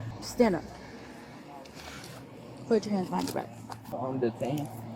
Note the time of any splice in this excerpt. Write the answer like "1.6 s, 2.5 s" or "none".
3.8 s